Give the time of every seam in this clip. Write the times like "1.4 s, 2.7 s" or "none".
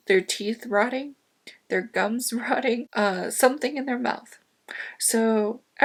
none